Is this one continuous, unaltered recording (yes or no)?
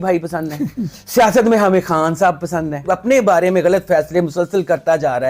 no